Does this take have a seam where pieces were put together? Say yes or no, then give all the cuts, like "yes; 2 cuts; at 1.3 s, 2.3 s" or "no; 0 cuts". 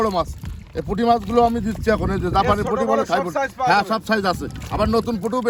no; 0 cuts